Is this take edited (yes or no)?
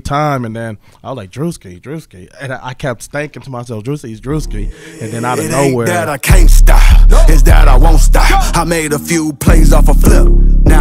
yes